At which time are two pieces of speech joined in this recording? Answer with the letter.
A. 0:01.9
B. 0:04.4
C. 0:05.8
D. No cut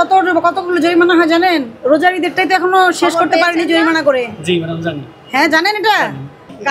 D